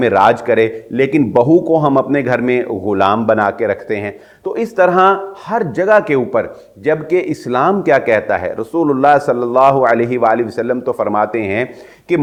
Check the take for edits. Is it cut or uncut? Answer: uncut